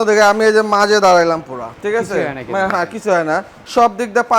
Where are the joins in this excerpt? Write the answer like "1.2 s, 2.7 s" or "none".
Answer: none

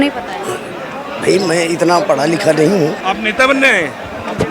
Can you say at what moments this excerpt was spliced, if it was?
3.0 s

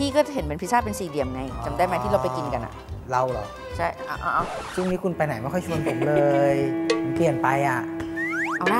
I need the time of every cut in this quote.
none

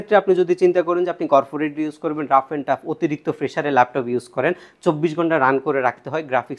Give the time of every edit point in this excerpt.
none

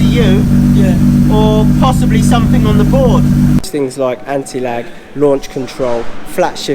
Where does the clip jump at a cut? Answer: 3.6 s

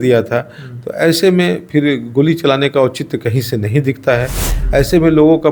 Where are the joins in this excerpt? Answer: none

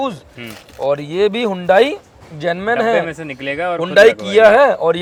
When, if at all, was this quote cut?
none

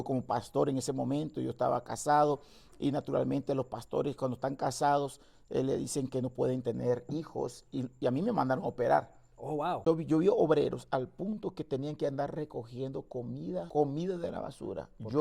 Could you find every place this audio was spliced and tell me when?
9.8 s, 13.7 s

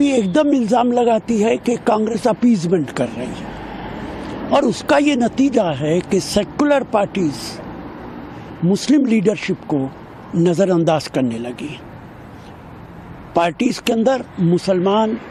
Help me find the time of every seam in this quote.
none

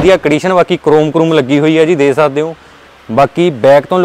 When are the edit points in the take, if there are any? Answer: none

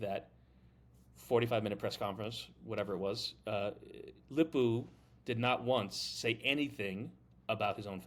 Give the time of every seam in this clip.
none

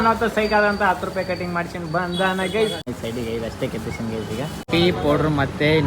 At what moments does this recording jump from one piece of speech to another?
2.9 s, 4.6 s

